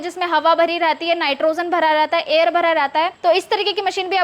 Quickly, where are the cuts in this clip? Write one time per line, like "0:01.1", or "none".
0:03.1